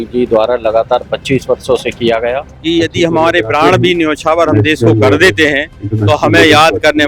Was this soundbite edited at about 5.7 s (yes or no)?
no